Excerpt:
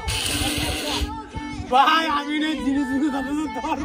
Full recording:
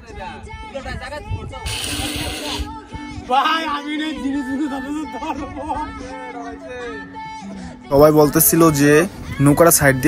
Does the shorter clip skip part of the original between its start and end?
no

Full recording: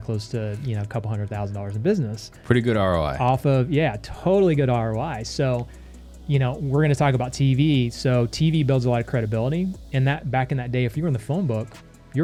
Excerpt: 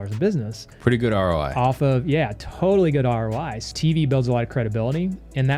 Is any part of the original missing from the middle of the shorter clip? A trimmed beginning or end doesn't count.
yes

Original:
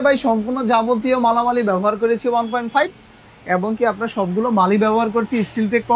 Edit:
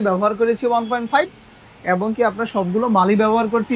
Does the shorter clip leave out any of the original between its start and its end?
no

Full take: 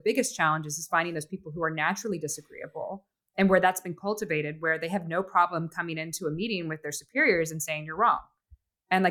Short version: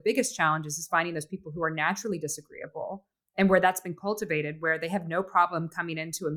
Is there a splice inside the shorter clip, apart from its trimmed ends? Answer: no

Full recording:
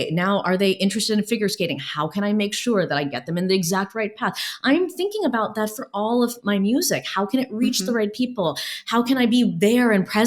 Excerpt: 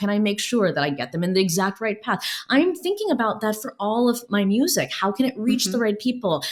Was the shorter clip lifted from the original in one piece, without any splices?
yes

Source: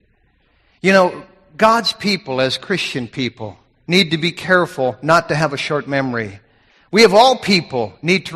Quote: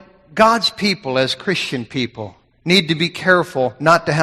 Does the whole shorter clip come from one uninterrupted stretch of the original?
yes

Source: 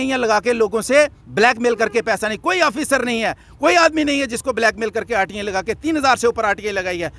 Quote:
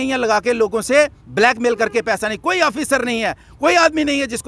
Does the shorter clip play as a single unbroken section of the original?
yes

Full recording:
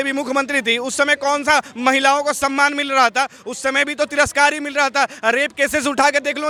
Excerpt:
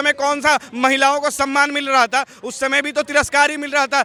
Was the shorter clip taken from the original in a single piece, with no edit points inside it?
yes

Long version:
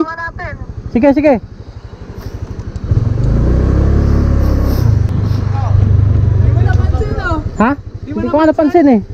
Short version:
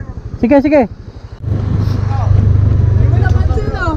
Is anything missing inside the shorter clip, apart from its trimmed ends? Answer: yes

